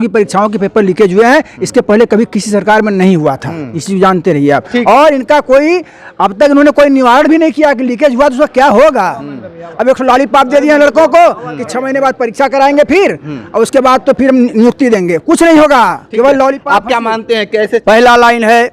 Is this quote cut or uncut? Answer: cut